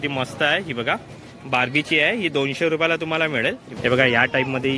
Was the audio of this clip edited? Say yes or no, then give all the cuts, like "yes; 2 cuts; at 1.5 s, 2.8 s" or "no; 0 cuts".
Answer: yes; 1 cut; at 3.7 s